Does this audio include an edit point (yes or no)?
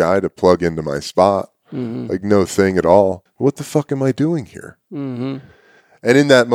yes